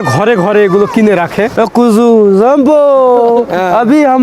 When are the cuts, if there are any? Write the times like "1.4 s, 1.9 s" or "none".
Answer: 1.6 s